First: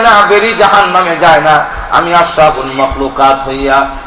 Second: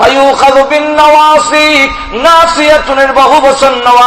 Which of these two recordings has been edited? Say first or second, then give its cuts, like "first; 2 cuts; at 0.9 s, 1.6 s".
first; 1 cut; at 2.9 s